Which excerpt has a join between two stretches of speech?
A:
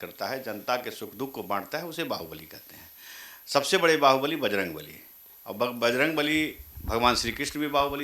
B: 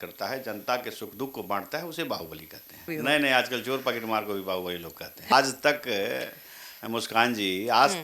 B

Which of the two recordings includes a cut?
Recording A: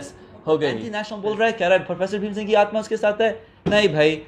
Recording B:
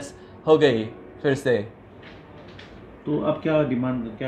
A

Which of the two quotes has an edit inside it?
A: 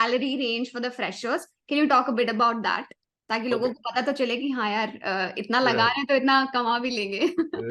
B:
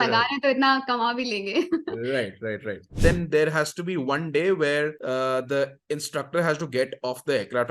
B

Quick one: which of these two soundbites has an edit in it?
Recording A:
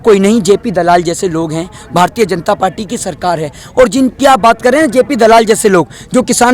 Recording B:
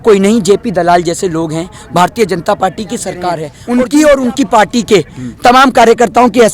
B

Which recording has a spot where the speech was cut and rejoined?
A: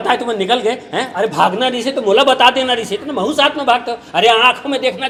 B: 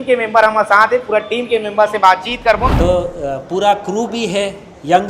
B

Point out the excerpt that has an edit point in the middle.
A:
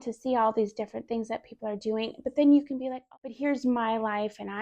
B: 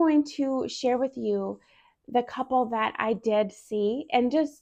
A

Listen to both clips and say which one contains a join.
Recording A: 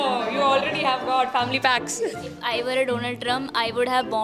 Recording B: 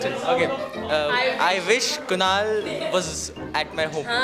A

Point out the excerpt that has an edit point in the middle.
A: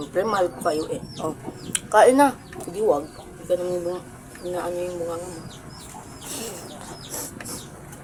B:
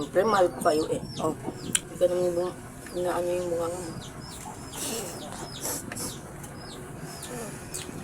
B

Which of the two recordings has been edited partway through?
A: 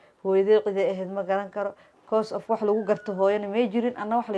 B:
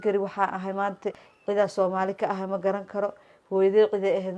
B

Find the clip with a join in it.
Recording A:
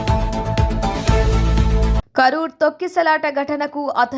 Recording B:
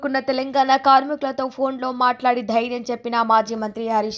A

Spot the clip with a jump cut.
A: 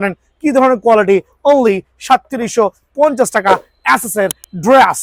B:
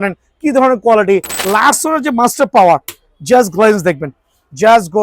B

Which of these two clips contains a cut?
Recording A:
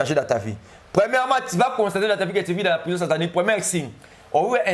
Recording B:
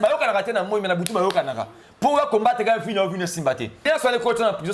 B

